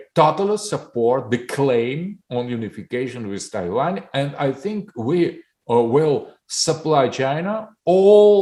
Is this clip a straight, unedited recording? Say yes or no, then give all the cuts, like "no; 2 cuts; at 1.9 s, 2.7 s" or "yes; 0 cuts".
yes; 0 cuts